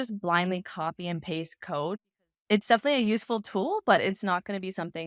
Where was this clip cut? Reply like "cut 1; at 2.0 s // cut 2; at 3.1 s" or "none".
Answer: cut 1; at 2.0 s